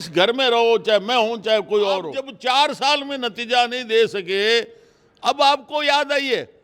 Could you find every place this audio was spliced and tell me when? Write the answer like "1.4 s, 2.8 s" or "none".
2.2 s